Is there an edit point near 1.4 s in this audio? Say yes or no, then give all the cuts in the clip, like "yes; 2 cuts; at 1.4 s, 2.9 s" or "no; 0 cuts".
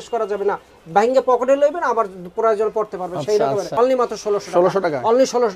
no; 1 cut; at 3.8 s